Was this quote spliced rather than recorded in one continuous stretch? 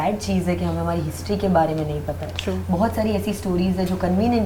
no; 0 cuts

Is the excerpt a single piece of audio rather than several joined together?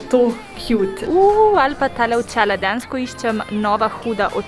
no; 1 cut; at 1.0 s

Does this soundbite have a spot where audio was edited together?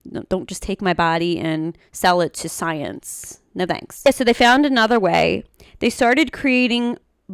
yes; 1 cut; at 3.9 s

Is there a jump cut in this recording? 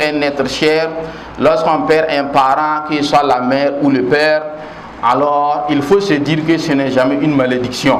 no; 0 cuts

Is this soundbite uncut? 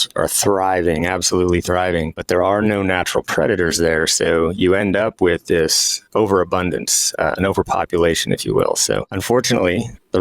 no; 2 cuts; at 2.2 s, 9.1 s

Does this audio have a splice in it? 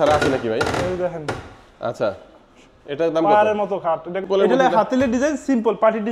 yes; 1 cut; at 4.3 s

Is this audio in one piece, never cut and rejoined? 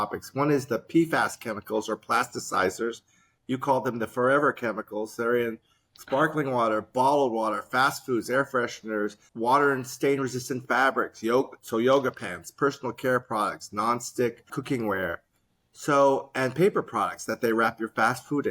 no; 2 cuts; at 9.2 s, 14.6 s

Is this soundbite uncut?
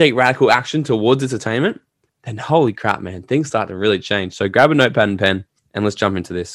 no; 1 cut; at 5.6 s

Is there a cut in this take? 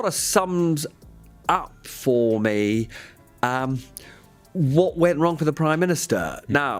no; 0 cuts

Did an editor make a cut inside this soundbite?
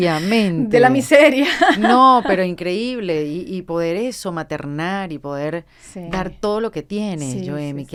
no; 0 cuts

